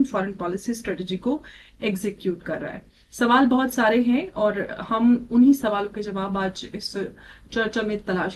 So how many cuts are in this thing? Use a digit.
0